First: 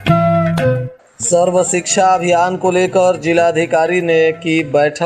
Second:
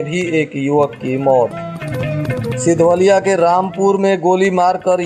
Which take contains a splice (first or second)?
first